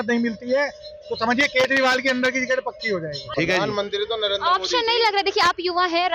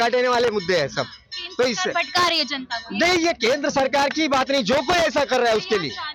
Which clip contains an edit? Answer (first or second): first